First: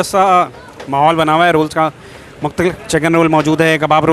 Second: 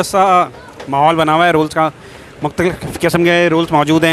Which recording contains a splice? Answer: first; 1 cut; at 2.8 s

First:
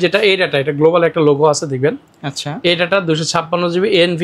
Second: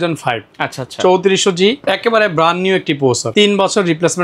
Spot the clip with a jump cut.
second; 2 cuts; at 1.8 s, 3.2 s

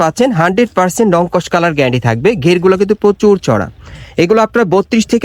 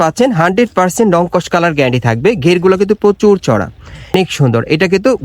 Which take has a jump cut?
second; 1 cut; at 4.1 s

